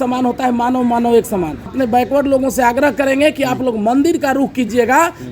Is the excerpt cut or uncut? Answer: cut